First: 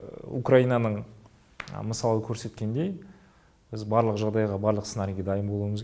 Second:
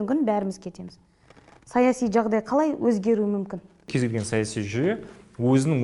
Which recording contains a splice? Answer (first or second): second